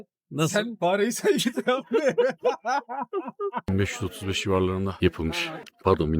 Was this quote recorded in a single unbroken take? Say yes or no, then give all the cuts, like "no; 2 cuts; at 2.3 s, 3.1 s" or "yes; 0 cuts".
no; 1 cut; at 3.6 s